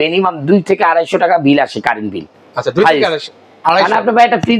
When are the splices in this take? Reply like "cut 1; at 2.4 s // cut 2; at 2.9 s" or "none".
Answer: none